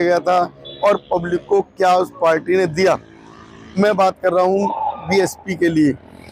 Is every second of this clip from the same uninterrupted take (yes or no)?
yes